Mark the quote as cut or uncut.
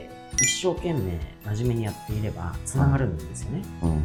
uncut